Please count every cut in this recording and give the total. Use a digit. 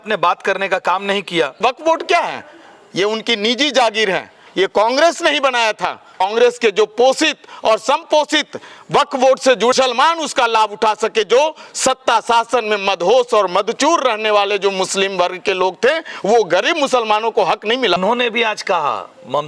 4